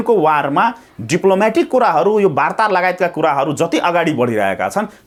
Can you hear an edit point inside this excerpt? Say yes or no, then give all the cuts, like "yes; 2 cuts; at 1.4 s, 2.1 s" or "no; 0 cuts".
no; 0 cuts